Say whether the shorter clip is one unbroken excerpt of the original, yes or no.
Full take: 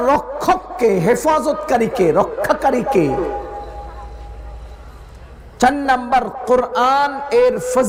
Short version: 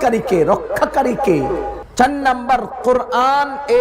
no